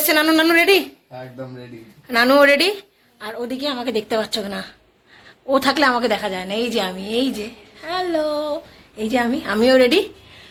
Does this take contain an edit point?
no; 0 cuts

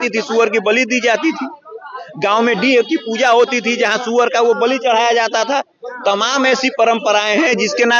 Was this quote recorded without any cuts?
yes; 0 cuts

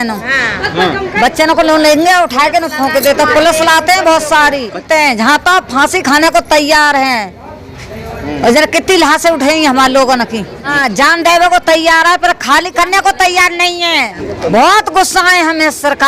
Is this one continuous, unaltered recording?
no; 3 cuts; at 4.8 s, 10.8 s, 14.2 s

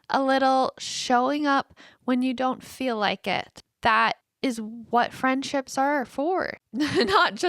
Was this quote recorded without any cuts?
no; 3 cuts; at 3.6 s, 4.3 s, 6.6 s

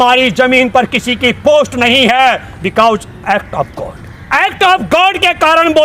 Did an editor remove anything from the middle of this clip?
yes; 1 cut; at 4.2 s

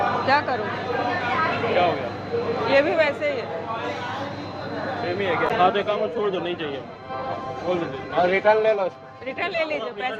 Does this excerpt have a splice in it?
no; 0 cuts

